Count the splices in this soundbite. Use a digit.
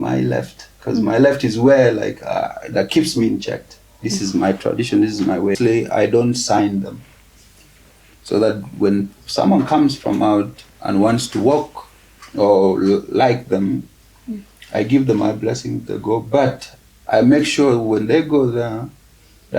1